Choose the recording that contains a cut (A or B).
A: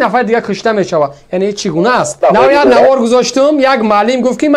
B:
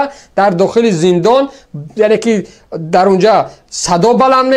A